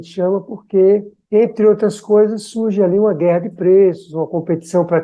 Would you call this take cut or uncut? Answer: uncut